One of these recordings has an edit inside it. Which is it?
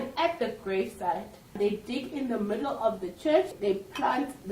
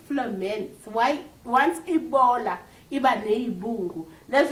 first; 2 cuts; at 1.6 s, 3.5 s

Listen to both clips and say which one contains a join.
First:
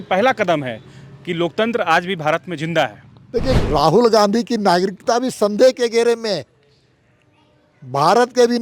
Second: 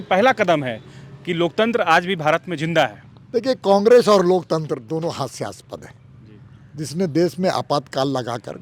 first; 1 cut; at 3.6 s

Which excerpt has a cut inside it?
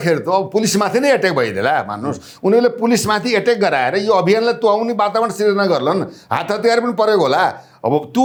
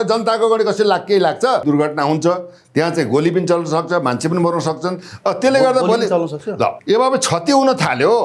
second; 2 cuts; at 1.6 s, 6.8 s

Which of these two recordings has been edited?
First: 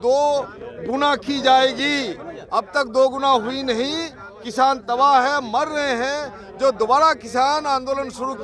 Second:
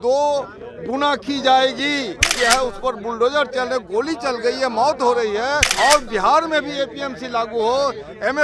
second; 2 cuts; at 2.3 s, 5.7 s

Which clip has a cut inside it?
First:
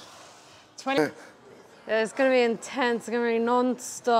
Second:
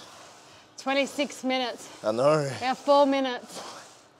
first; 1 cut; at 1.0 s

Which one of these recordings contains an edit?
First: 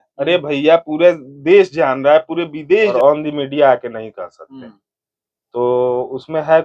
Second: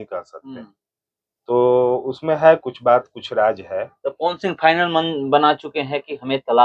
first; 1 cut; at 2.9 s

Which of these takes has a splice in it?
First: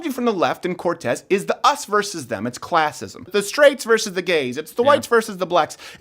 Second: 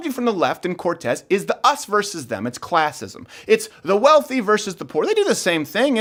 first; 1 cut; at 3.3 s

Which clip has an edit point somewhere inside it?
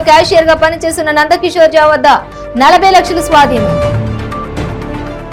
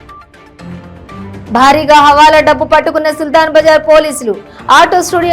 second; 1 cut; at 1.3 s

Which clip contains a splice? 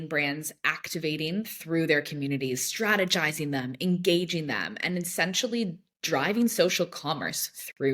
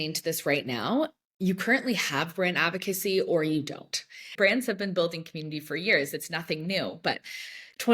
second; 1 cut; at 4.3 s

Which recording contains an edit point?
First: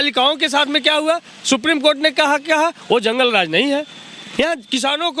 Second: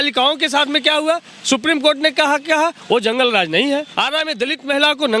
second; 1 cut; at 3.9 s

